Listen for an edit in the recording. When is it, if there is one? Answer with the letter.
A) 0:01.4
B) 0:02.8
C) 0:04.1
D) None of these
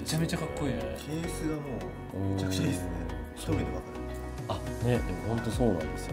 D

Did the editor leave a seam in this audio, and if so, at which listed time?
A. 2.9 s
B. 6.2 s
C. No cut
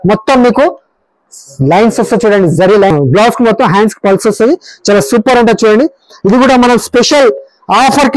A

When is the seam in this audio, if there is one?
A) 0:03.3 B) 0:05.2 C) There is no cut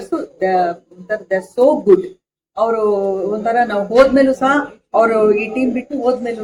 C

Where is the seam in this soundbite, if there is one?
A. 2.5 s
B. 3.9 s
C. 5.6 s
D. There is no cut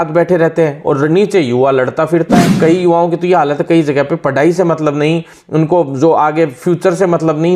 A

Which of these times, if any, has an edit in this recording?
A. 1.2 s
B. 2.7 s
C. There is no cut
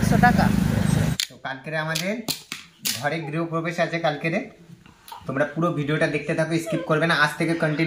A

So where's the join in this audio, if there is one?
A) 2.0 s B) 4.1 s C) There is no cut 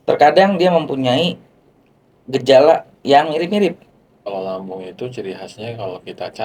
B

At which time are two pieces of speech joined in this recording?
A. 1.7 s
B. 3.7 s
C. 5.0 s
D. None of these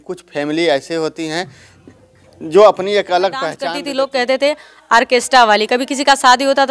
B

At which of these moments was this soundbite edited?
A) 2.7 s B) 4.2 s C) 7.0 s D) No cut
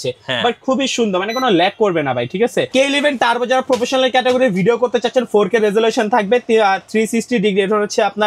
A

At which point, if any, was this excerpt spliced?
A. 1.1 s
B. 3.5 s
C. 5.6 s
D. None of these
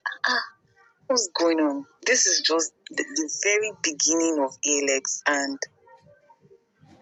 D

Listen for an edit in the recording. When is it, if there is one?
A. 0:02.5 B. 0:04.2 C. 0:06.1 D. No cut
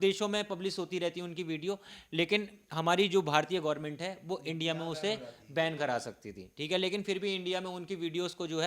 D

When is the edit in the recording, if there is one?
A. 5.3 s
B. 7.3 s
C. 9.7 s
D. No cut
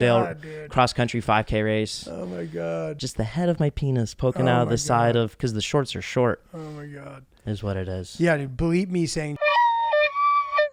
D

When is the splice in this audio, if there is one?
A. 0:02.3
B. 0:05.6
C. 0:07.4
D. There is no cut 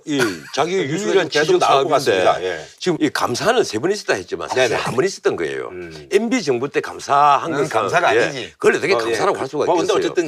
B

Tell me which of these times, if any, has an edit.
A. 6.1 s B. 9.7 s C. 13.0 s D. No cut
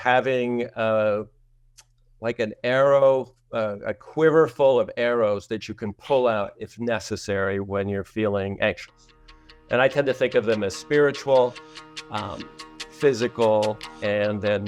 D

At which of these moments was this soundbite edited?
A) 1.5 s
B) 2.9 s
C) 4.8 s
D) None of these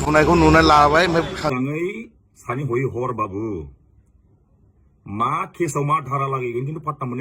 A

